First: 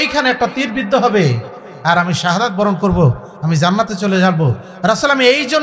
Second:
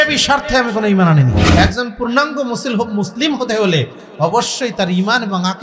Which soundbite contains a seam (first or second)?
second